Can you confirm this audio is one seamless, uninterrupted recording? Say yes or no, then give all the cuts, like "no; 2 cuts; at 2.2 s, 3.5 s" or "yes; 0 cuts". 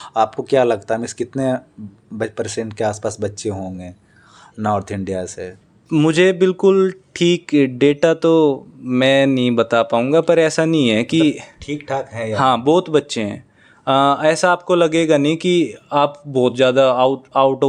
yes; 0 cuts